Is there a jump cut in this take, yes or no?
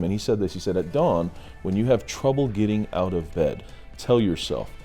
yes